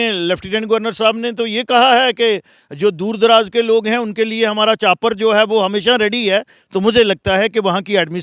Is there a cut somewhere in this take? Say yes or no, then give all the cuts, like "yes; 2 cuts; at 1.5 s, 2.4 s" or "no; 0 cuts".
no; 0 cuts